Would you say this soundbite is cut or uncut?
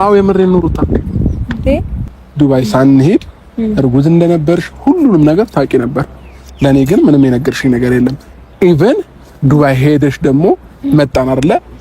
cut